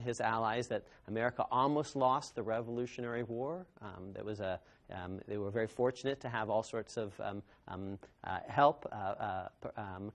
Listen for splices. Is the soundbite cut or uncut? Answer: cut